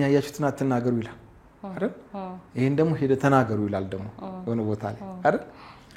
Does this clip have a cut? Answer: no; 0 cuts

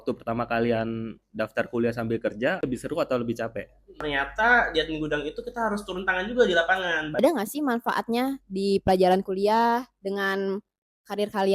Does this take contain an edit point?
yes; 2 cuts; at 3.9 s, 7.2 s

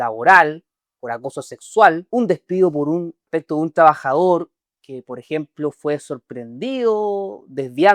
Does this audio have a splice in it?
yes; 2 cuts; at 2.0 s, 3.2 s

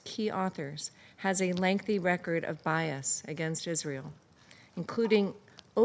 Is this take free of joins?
yes; 0 cuts

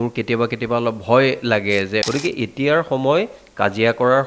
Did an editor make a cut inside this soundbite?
yes; 1 cut; at 2.1 s

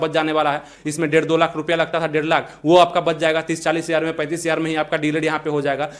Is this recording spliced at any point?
no; 0 cuts

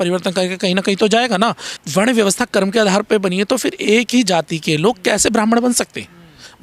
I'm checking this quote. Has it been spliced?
yes; 1 cut; at 1.7 s

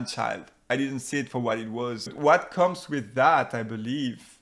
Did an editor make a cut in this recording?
yes; 1 cut; at 2.1 s

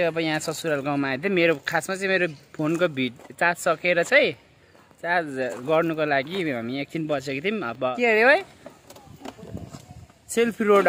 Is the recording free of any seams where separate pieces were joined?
no; 1 cut; at 7.9 s

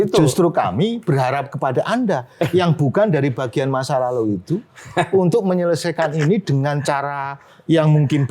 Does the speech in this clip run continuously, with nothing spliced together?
yes; 0 cuts

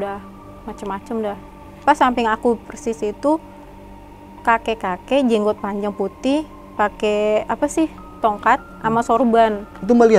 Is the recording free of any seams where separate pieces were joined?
no; 1 cut; at 1.7 s

